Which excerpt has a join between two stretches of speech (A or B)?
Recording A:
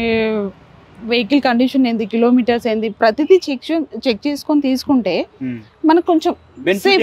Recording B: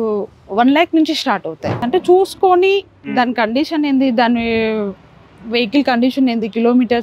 B